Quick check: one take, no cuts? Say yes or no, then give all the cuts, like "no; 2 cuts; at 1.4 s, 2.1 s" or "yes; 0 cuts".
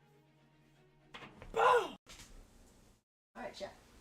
no; 1 cut; at 1.0 s